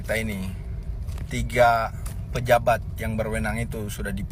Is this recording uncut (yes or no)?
yes